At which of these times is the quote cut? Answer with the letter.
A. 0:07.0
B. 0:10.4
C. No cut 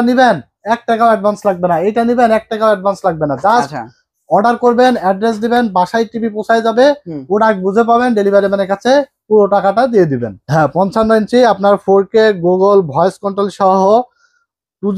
B